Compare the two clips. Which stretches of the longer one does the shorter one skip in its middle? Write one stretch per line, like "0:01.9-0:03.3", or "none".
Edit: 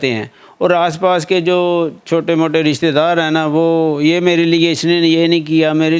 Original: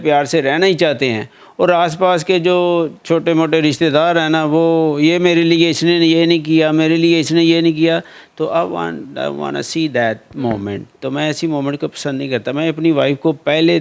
none